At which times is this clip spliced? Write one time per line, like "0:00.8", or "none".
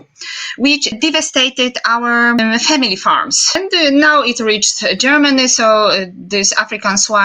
0:00.9
0:02.4
0:03.5